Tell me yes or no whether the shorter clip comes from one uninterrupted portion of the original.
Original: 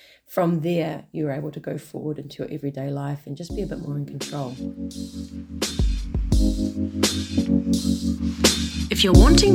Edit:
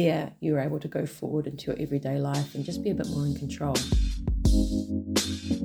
no